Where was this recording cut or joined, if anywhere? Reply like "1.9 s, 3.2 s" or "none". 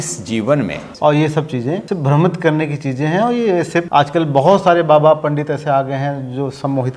0.9 s, 1.8 s, 3.9 s

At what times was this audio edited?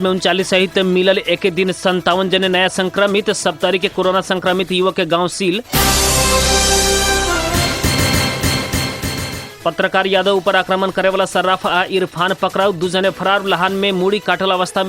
none

